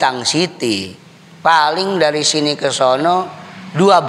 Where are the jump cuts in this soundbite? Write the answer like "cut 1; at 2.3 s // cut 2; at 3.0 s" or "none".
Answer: none